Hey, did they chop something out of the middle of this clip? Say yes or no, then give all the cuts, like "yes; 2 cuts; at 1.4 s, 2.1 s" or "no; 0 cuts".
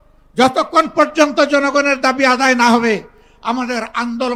no; 0 cuts